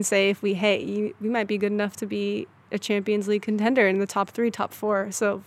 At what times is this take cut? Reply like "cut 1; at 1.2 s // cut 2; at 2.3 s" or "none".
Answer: none